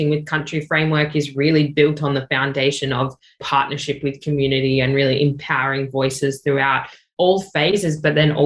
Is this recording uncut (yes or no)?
no